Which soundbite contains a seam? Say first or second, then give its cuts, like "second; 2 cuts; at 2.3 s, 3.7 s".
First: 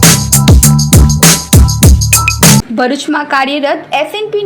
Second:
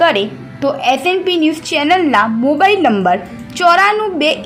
first; 1 cut; at 2.7 s